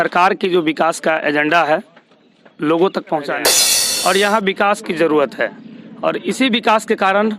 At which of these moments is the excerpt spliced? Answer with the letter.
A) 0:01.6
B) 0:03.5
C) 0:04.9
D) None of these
B